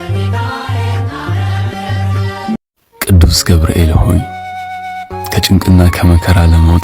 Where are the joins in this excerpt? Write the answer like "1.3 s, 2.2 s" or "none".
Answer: 2.6 s